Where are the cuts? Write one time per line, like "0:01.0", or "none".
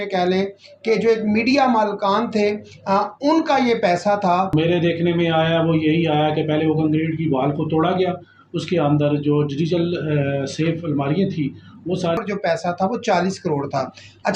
0:04.5
0:12.2